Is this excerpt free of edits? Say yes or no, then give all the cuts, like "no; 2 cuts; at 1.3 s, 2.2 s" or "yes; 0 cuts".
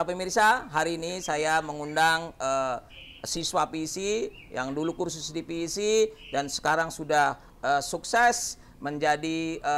yes; 0 cuts